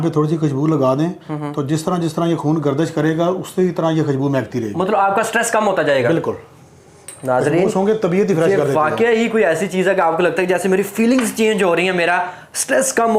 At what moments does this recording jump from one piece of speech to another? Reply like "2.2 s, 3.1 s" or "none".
none